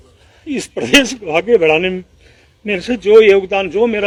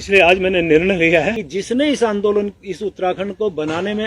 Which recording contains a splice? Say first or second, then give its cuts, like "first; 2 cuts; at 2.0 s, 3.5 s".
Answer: second; 1 cut; at 1.4 s